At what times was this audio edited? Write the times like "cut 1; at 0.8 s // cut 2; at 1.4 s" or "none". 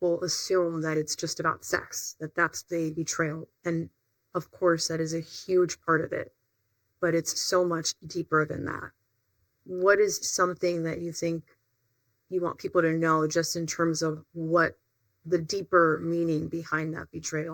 none